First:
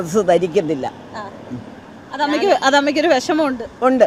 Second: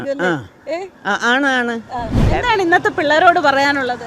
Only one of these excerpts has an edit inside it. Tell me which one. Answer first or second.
second